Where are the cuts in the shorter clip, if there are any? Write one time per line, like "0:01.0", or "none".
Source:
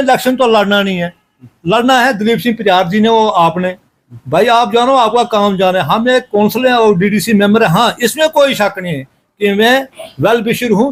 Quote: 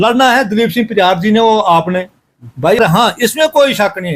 0:02.8